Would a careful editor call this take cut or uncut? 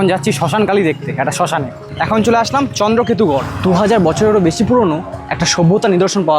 cut